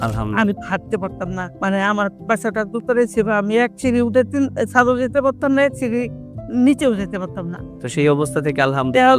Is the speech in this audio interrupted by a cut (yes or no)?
yes